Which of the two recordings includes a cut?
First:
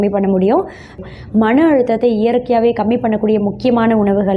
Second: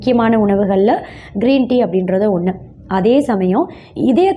first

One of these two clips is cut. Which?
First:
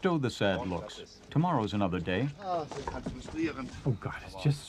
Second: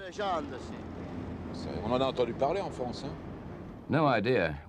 second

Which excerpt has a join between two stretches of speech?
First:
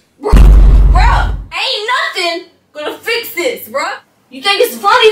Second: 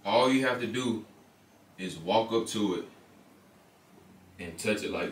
first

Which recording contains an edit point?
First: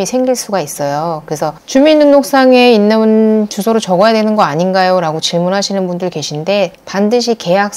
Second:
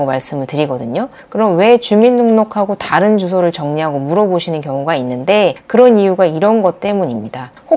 first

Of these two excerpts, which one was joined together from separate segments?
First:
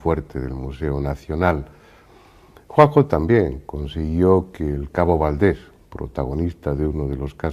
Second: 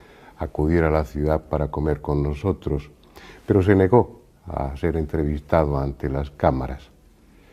first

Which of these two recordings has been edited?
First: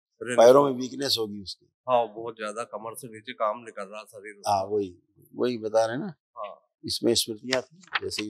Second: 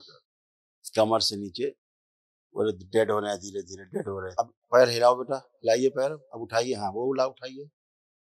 second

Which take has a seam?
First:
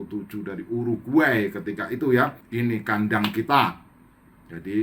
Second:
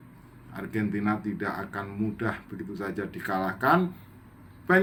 first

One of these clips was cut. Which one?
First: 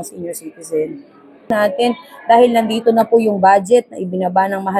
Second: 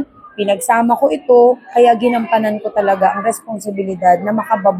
first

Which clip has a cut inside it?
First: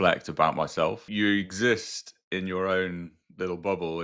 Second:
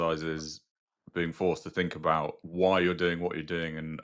first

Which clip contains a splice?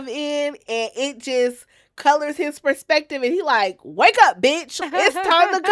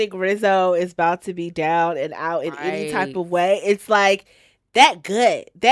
first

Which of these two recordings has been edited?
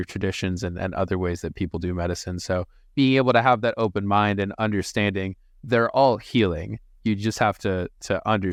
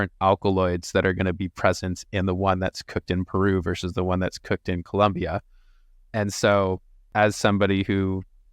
second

